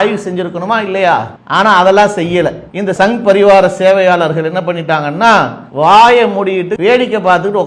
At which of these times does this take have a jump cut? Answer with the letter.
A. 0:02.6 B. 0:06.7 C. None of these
B